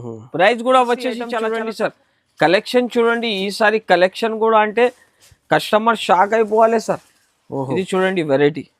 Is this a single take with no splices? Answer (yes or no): no